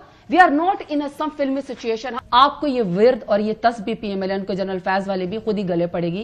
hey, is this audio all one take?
no; 1 cut; at 2.1 s

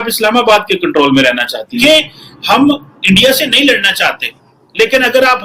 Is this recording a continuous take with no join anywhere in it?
no; 1 cut; at 2.1 s

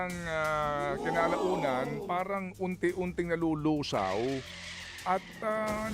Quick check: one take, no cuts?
yes; 0 cuts

